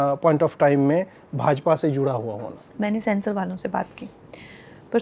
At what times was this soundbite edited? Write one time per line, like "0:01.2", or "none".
0:02.6